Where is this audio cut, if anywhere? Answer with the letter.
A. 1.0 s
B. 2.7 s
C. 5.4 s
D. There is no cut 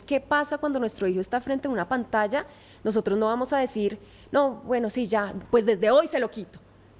C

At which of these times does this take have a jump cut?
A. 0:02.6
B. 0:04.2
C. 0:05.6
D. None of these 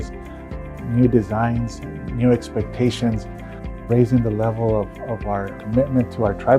C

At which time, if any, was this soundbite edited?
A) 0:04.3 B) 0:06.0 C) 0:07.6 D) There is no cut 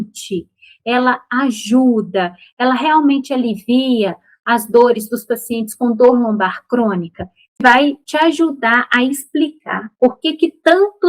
C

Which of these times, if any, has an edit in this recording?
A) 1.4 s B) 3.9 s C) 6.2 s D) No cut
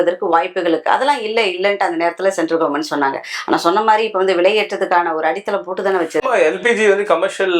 D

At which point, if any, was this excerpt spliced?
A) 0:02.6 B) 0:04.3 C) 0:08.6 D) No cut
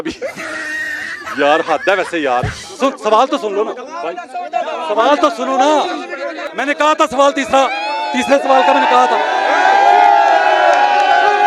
A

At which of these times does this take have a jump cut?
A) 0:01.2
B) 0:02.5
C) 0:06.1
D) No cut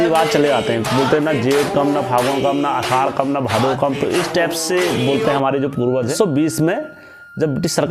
C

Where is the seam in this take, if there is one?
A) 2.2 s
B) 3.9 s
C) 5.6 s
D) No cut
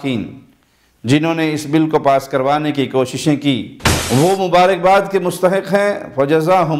D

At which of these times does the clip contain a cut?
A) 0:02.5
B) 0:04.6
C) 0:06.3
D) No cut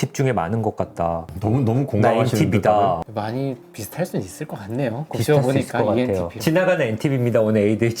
C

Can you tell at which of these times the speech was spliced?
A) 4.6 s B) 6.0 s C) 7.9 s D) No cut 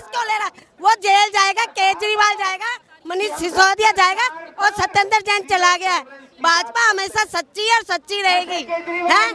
D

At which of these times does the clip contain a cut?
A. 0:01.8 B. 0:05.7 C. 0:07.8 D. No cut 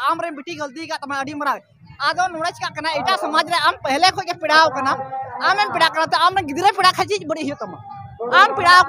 A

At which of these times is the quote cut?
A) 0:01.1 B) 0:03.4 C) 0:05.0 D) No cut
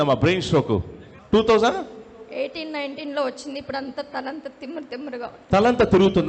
A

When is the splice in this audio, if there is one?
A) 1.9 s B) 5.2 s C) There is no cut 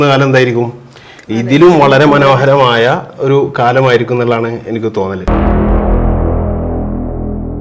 B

